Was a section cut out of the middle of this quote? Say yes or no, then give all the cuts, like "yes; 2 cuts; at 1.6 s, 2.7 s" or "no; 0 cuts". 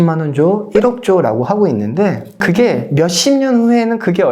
no; 0 cuts